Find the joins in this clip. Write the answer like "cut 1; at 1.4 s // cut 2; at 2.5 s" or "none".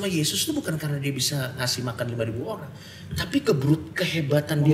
none